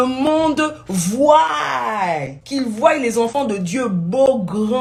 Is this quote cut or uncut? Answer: uncut